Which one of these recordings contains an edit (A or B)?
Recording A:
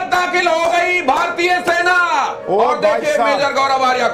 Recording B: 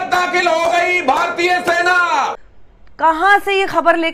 B